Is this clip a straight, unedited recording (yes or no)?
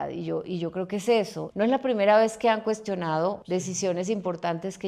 no